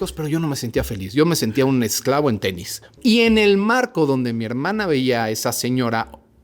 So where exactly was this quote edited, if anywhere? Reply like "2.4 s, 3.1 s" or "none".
2.9 s